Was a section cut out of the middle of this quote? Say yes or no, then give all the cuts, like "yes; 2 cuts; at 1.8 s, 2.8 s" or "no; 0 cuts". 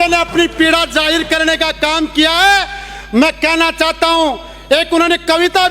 no; 0 cuts